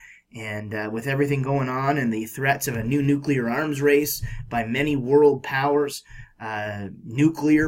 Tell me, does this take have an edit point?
no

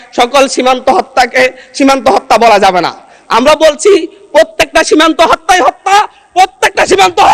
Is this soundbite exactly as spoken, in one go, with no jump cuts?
yes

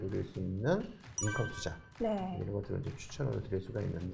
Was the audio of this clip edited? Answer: no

